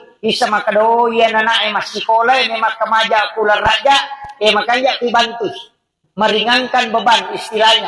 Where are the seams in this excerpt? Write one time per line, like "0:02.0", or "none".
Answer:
none